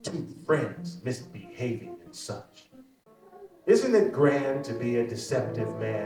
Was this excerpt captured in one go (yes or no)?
no